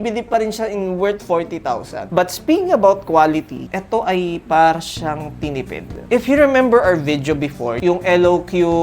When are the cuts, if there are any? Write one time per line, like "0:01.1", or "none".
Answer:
0:02.1
0:07.8